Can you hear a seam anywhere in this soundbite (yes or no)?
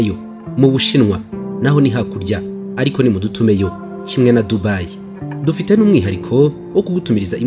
no